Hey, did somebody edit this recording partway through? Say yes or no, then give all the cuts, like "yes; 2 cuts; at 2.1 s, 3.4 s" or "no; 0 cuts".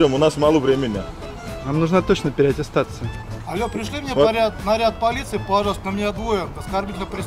no; 0 cuts